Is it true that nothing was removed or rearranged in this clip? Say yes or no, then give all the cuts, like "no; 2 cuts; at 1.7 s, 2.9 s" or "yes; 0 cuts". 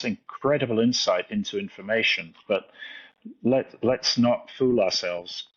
yes; 0 cuts